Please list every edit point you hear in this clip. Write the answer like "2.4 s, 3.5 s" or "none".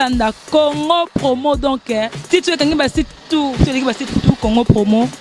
none